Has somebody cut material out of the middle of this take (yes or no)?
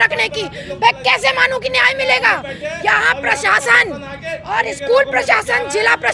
no